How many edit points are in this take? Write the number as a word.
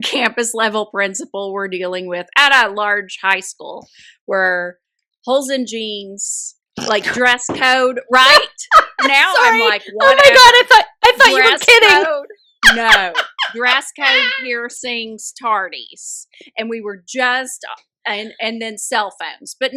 zero